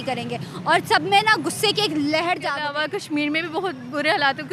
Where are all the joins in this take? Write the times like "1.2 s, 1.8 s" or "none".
2.6 s